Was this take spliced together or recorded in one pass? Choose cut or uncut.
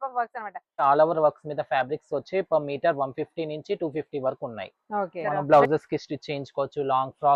cut